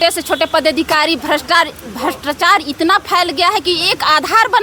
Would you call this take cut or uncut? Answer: uncut